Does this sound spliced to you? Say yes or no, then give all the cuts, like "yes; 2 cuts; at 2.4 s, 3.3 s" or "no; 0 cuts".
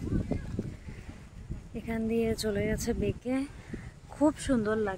no; 0 cuts